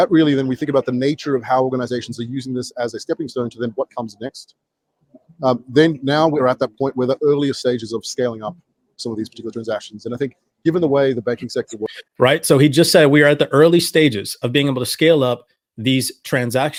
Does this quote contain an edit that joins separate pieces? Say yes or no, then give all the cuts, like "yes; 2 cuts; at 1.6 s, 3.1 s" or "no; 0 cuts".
no; 0 cuts